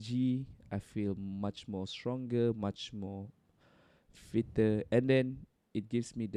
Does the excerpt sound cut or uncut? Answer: uncut